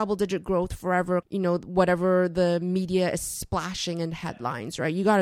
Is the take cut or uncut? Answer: cut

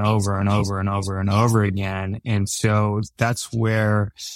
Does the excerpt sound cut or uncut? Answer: uncut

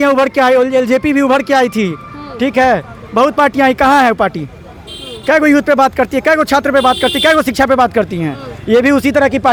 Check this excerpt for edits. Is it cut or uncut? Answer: uncut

